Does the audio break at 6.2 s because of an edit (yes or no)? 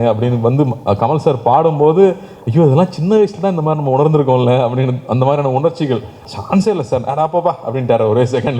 yes